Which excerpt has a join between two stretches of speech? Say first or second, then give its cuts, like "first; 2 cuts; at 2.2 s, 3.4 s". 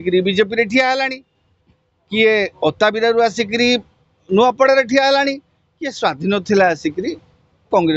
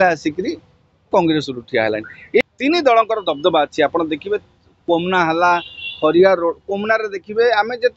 second; 1 cut; at 2.4 s